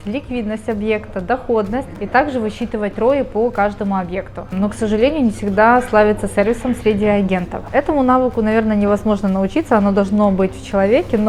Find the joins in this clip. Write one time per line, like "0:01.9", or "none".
0:02.0
0:04.4
0:07.6